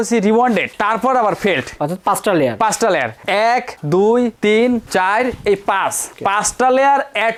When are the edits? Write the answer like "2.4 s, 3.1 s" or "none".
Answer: none